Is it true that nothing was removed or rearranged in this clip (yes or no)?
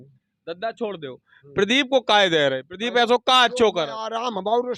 yes